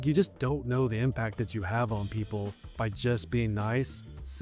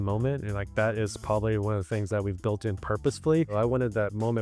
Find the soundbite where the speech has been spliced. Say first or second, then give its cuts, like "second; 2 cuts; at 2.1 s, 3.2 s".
second; 1 cut; at 3.5 s